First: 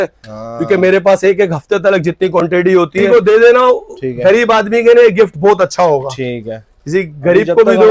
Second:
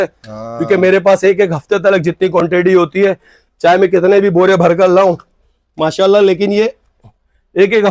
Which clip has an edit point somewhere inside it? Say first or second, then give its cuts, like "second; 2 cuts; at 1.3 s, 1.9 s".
first; 1 cut; at 3.1 s